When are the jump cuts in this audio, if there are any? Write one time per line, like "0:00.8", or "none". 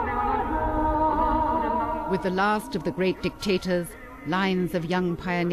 0:01.7

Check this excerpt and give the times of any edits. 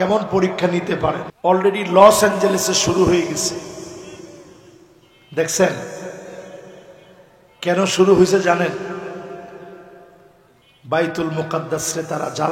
0:01.3

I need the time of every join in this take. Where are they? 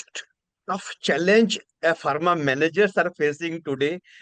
none

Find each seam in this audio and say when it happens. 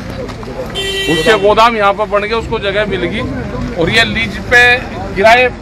none

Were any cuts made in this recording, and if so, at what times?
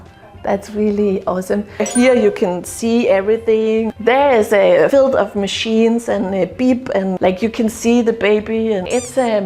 0:01.8
0:03.9

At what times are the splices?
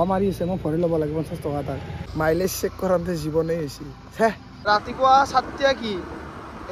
0:02.0
0:04.5

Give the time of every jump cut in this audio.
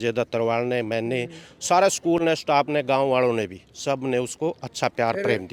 none

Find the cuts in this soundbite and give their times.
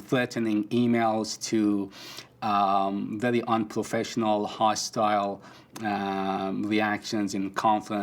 none

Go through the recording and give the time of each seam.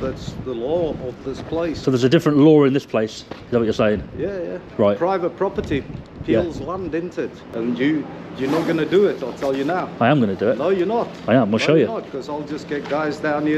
0:01.8
0:07.4

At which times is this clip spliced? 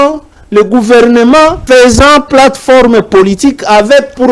0:01.6

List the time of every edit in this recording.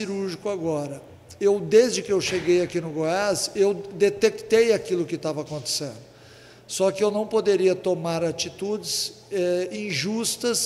none

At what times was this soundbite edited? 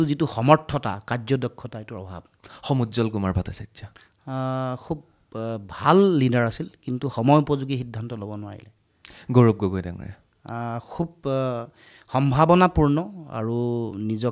none

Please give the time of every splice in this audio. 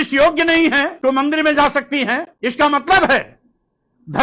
0:00.9
0:02.3

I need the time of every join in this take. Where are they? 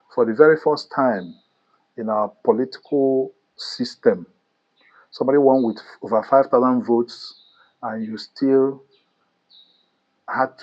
none

